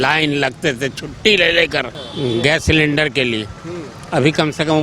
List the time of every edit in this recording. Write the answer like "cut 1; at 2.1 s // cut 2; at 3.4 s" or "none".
cut 1; at 2.0 s